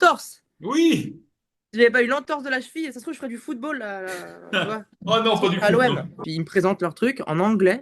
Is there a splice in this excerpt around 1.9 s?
no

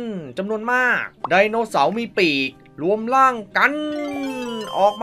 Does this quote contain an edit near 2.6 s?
no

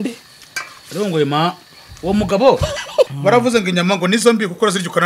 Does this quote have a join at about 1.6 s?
no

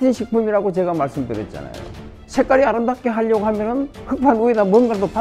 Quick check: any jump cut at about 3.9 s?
no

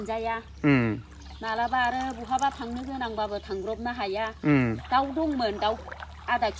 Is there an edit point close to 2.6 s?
no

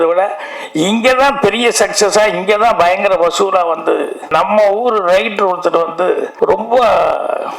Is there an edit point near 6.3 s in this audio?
yes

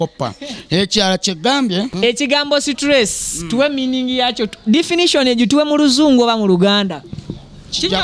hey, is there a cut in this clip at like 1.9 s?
yes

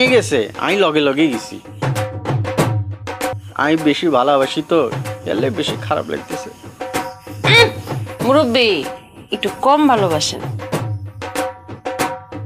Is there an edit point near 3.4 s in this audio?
yes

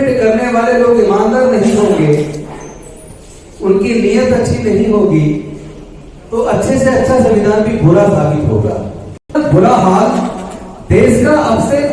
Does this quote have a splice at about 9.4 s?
yes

